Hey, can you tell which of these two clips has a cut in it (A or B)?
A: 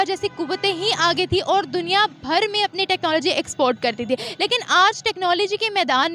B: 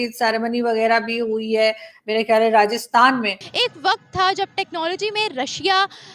B